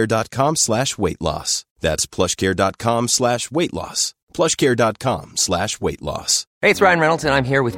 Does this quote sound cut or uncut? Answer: cut